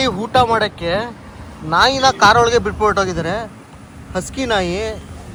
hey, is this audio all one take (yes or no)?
yes